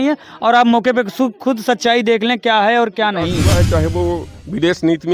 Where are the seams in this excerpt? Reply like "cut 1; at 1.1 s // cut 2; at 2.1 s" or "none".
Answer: cut 1; at 3.4 s

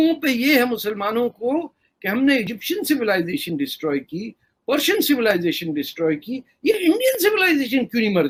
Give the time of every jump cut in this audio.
none

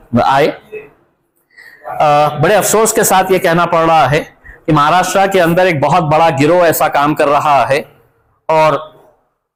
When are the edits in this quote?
none

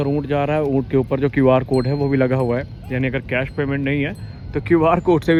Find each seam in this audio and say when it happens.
none

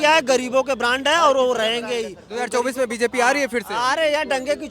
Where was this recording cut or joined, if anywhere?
cut 1; at 2.2 s

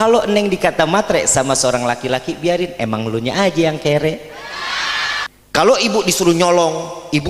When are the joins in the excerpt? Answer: cut 1; at 5.3 s

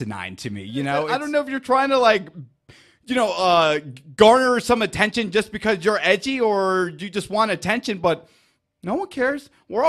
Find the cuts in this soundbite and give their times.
cut 1; at 1.2 s

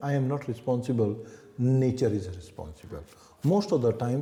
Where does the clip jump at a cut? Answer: none

